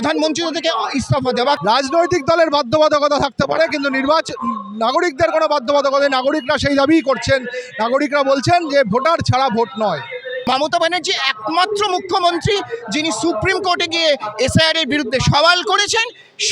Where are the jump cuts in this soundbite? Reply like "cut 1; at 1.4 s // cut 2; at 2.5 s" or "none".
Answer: cut 1; at 1.6 s // cut 2; at 10.4 s